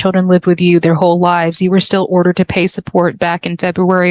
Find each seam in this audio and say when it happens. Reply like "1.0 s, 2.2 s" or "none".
none

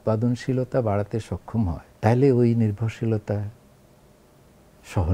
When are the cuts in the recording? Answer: 1.9 s

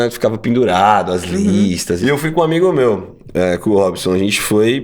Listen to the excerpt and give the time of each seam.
2.0 s

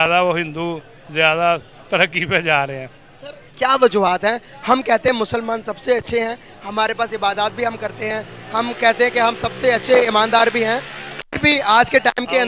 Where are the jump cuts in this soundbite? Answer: none

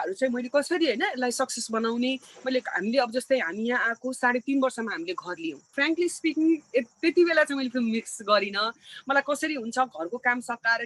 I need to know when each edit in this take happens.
5.7 s

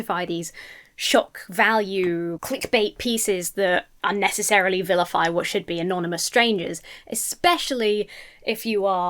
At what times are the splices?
2.4 s

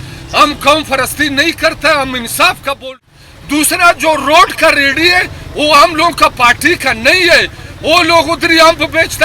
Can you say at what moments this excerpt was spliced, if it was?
2.8 s

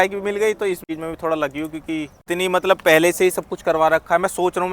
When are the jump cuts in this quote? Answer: 0.9 s, 2.2 s

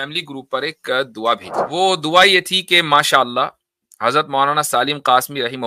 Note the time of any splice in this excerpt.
1.6 s

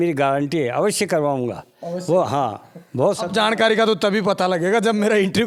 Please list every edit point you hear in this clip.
none

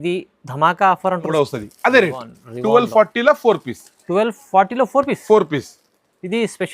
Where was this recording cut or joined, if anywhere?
1.3 s

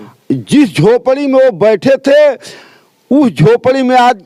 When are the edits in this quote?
none

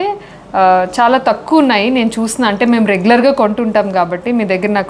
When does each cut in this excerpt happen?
none

